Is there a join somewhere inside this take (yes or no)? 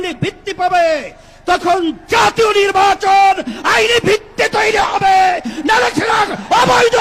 no